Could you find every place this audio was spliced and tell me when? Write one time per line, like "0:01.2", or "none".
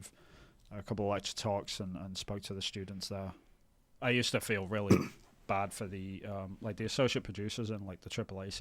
0:03.9